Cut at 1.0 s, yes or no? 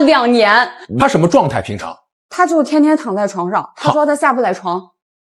yes